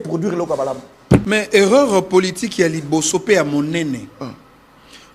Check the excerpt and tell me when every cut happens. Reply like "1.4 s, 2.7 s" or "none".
1.2 s